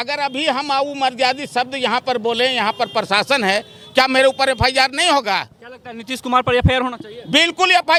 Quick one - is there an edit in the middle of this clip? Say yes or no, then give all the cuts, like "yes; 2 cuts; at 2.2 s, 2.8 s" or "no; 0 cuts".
no; 0 cuts